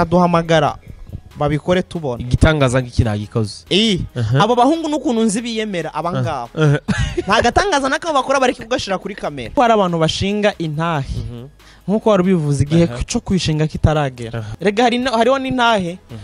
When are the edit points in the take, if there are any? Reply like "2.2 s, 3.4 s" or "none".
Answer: 9.5 s, 14.4 s